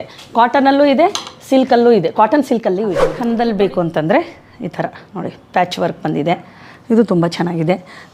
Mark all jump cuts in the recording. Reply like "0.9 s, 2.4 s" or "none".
3.1 s